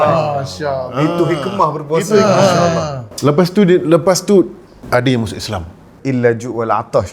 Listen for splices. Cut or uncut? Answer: cut